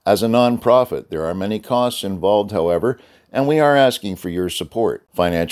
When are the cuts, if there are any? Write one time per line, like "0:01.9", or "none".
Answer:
none

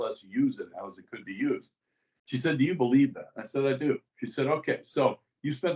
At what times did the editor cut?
none

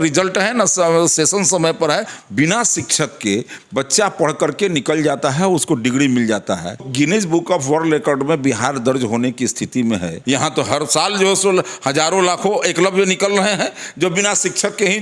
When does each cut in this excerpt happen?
0:02.2
0:06.9
0:10.1

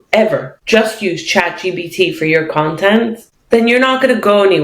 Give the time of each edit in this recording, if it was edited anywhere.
none

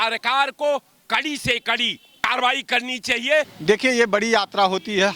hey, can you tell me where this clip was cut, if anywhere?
0:02.3
0:03.5

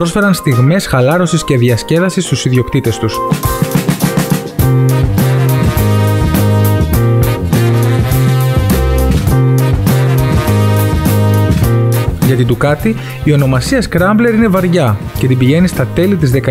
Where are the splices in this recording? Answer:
0:13.4

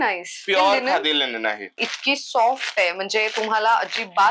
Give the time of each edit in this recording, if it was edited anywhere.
0:01.8

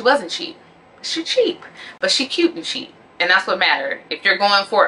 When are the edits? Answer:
none

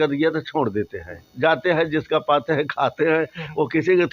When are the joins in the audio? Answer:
0:01.2

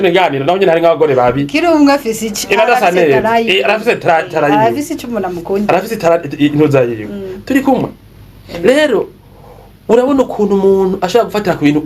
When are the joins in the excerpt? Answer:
none

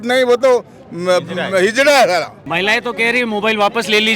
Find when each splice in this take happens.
0:02.4

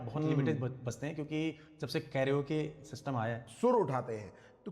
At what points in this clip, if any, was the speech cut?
0:03.4

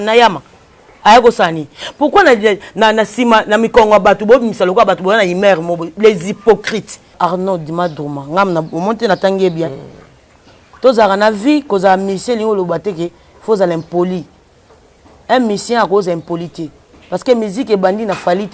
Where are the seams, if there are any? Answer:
0:07.1

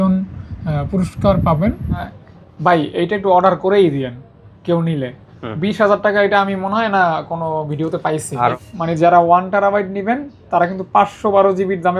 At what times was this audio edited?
0:02.1
0:08.5

